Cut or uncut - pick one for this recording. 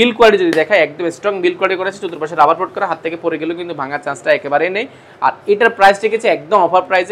uncut